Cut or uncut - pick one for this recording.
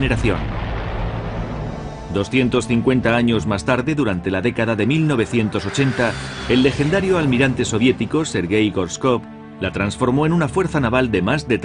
cut